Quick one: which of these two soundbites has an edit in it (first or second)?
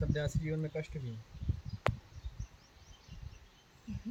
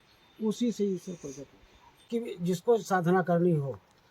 second